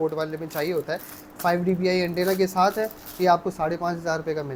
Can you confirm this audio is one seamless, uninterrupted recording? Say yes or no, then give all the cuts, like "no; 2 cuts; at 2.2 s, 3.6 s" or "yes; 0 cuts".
yes; 0 cuts